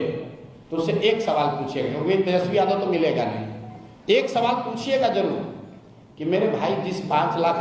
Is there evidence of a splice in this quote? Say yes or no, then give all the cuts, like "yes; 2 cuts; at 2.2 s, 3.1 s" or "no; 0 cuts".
no; 0 cuts